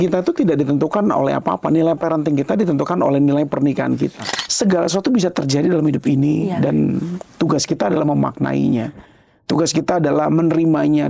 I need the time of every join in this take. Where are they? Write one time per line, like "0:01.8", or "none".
0:04.2